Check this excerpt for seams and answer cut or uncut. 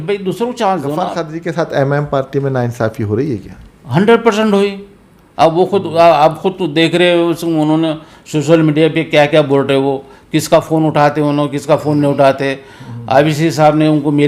cut